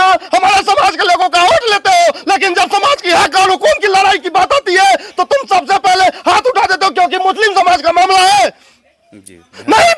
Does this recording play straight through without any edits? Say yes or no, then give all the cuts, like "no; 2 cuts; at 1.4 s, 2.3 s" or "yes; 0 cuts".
yes; 0 cuts